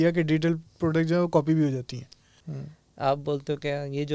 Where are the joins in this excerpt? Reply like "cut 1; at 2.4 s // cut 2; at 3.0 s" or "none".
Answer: cut 1; at 2.5 s